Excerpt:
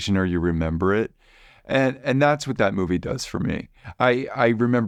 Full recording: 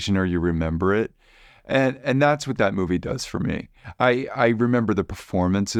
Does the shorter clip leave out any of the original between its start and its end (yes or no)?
no